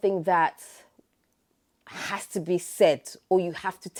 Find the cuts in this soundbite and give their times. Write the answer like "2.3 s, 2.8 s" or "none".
none